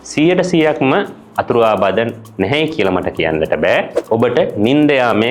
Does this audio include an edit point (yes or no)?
yes